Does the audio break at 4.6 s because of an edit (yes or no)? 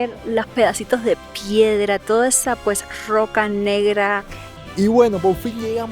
yes